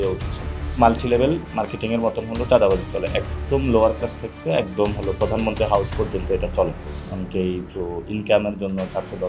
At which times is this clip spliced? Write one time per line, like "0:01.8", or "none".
0:00.8
0:06.8
0:07.7